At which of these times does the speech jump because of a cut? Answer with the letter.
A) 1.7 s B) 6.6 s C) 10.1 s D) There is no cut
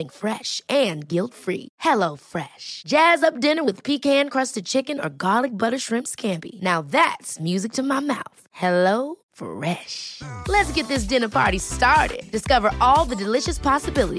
D